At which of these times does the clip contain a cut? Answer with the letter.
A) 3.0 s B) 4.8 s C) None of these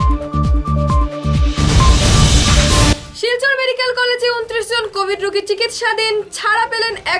C